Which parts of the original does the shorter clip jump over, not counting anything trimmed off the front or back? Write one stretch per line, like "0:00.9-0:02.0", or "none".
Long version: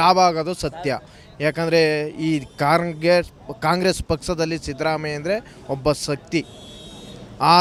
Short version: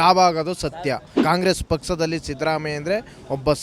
0:01.1-0:03.5